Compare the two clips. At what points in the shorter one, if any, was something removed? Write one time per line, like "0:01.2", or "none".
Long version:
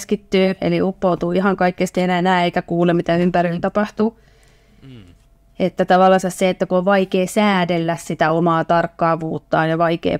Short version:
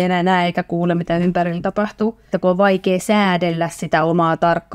0:02.3